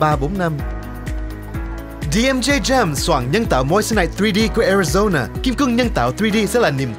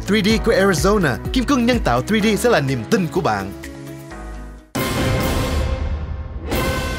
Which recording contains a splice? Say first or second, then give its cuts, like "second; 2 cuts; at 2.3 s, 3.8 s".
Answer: second; 1 cut; at 4.6 s